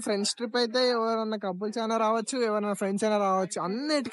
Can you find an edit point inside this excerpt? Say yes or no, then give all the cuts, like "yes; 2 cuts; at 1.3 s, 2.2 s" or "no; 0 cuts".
no; 0 cuts